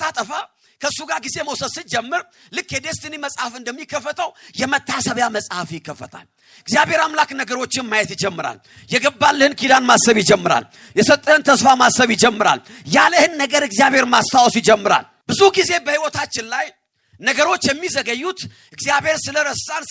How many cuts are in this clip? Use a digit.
1